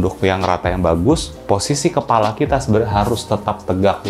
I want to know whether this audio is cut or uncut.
uncut